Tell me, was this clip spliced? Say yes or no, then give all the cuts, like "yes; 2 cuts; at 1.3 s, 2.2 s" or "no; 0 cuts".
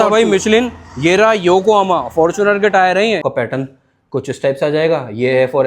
yes; 1 cut; at 3.2 s